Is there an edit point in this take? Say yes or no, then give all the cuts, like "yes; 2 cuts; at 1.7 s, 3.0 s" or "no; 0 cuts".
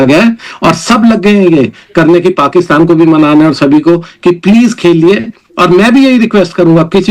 no; 0 cuts